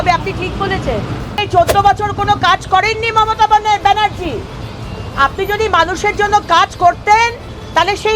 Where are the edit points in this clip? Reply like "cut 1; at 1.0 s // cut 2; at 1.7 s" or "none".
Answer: cut 1; at 1.4 s